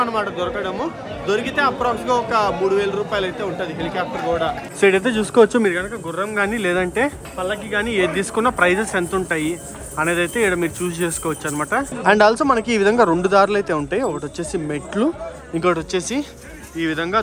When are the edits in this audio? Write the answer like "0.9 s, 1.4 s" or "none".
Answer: 4.7 s, 11.9 s